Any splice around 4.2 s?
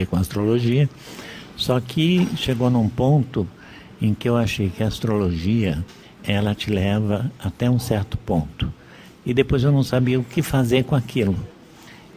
yes; 1 cut; at 4.2 s

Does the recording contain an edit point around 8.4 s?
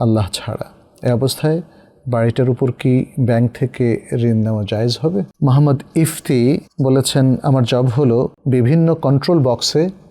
yes; 3 cuts; at 5.3 s, 6.7 s, 8.4 s

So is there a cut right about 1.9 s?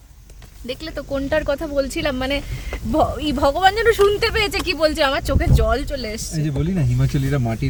no; 0 cuts

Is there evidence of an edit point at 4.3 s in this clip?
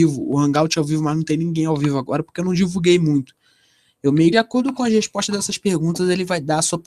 no; 0 cuts

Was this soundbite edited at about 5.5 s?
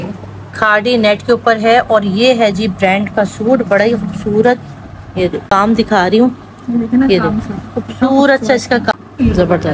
yes; 2 cuts; at 5.5 s, 8.9 s

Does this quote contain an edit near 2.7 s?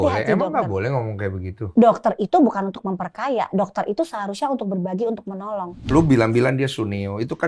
no; 1 cut; at 5.9 s

